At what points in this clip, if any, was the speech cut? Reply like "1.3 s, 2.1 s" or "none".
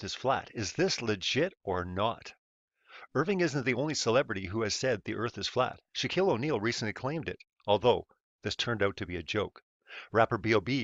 none

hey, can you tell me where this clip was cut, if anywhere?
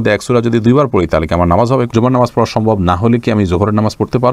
1.9 s

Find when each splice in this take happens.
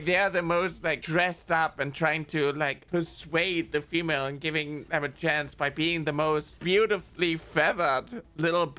6.5 s

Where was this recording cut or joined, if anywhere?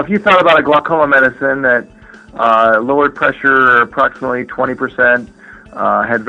none

